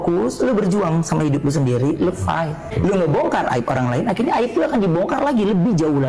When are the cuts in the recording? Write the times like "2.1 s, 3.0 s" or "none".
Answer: 2.7 s